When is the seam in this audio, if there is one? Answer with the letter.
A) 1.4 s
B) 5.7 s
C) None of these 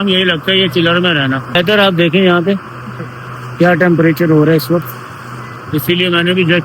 A